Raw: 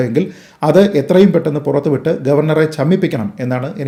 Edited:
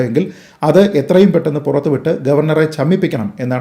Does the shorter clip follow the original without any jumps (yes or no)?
yes